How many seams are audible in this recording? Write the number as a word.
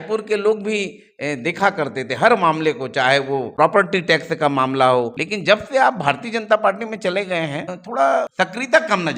four